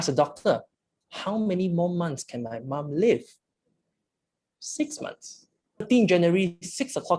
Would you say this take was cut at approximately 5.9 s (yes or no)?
yes